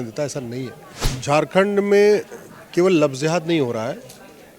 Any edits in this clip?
yes; 1 cut; at 1.1 s

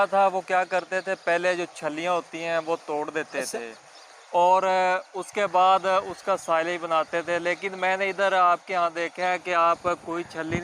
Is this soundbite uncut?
yes; 0 cuts

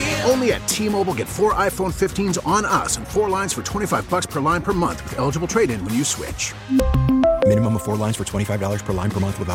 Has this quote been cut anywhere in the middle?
no; 0 cuts

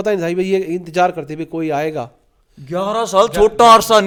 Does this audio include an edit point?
no; 0 cuts

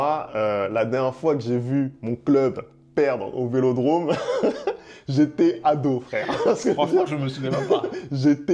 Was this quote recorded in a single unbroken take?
yes; 0 cuts

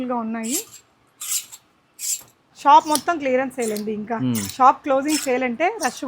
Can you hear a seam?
yes; 1 cut; at 2.5 s

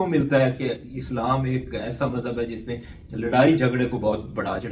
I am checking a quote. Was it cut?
no; 0 cuts

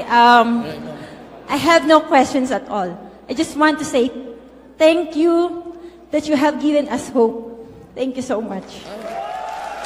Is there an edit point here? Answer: no; 0 cuts

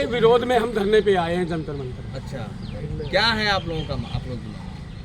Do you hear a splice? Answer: no; 0 cuts

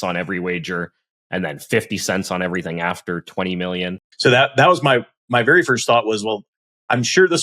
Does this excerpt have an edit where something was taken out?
yes; 1 cut; at 4.0 s

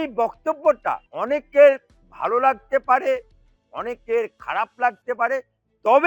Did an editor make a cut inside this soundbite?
yes; 1 cut; at 1.1 s

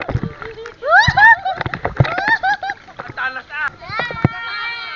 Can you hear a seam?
yes; 1 cut; at 3.8 s

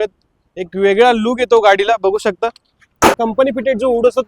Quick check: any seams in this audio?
yes; 1 cut; at 3.2 s

